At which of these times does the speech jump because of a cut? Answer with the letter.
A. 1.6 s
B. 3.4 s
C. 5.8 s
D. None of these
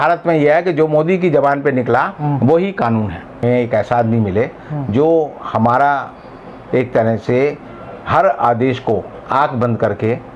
B